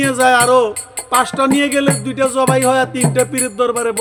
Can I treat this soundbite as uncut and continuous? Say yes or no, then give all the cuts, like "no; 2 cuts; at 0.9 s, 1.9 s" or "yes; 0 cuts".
yes; 0 cuts